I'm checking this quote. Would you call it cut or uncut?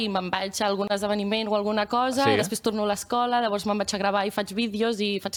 uncut